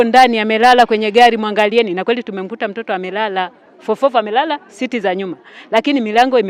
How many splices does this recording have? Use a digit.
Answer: 0